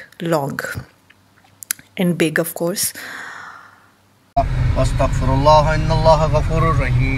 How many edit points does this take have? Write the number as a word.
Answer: one